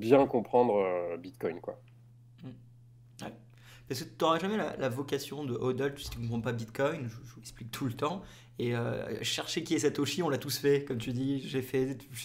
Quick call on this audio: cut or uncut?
uncut